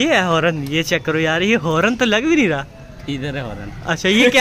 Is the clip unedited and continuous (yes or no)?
yes